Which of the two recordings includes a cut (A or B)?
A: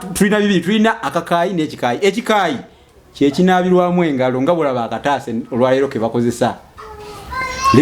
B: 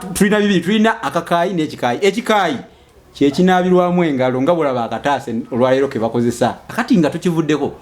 B